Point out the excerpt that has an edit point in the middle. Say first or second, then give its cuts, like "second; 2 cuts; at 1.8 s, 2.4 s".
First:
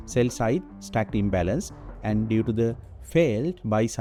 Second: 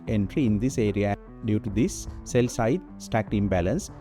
second; 1 cut; at 1.1 s